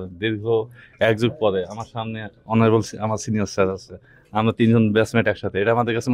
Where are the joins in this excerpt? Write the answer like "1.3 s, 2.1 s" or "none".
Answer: none